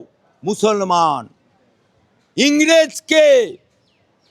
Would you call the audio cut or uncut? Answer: uncut